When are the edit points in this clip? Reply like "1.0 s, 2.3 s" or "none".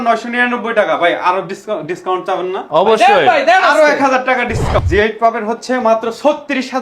4.8 s